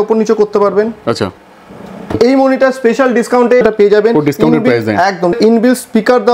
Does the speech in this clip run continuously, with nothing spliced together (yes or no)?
no